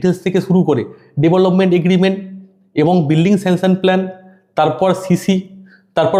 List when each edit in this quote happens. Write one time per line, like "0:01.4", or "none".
none